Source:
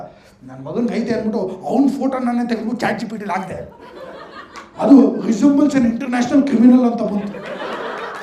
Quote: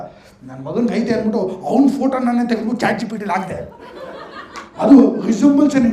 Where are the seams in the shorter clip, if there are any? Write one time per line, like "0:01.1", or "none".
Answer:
none